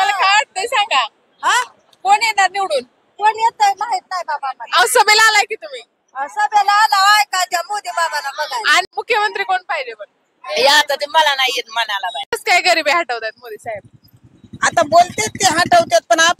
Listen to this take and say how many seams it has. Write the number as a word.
two